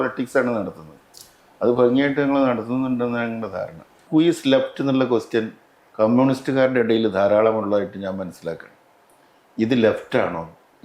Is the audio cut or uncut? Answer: cut